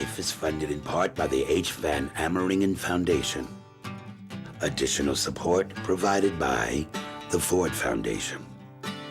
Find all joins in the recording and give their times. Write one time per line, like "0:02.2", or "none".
0:08.2